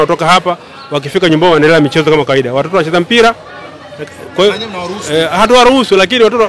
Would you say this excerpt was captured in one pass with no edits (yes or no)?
yes